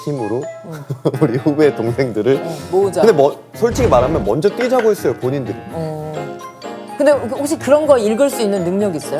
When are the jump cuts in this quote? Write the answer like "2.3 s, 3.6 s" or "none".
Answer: 5.6 s

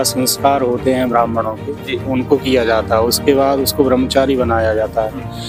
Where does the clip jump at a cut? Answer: none

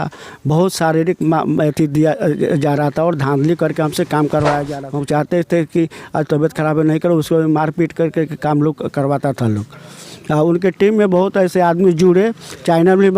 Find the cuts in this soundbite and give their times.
4.7 s

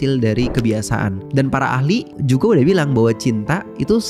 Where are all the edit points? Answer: 1.2 s, 2.1 s

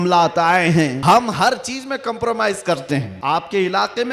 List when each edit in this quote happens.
1.0 s, 3.1 s

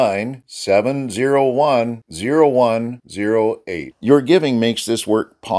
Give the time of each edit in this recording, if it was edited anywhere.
none

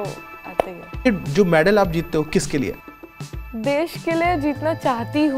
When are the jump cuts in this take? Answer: 1.1 s, 2.8 s

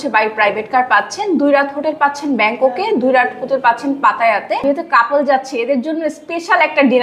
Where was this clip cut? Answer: 4.6 s

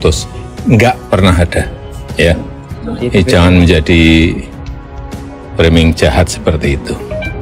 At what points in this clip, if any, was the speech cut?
none

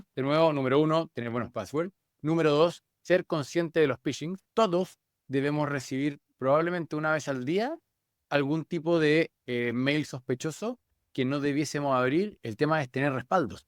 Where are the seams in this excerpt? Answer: 4.3 s, 12.4 s

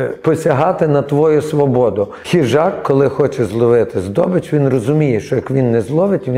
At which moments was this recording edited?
2.2 s

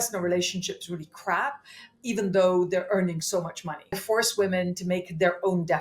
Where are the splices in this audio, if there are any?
4.0 s

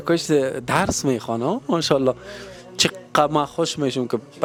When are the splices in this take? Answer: none

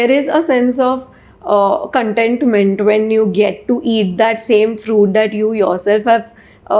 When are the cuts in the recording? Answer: none

